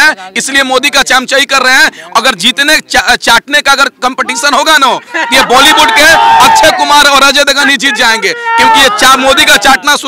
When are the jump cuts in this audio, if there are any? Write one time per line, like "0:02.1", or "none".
none